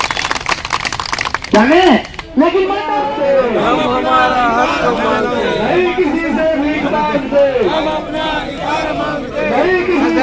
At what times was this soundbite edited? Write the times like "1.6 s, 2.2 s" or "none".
2.8 s